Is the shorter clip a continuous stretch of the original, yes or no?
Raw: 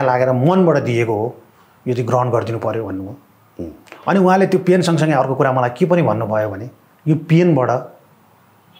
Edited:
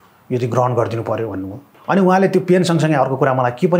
no